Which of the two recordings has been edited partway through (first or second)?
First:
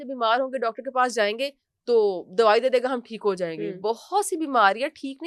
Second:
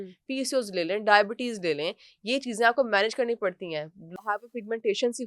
second